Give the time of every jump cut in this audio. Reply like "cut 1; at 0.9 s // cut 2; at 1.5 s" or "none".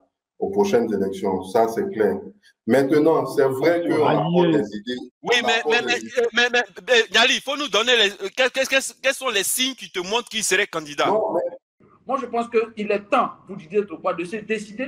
cut 1; at 11.8 s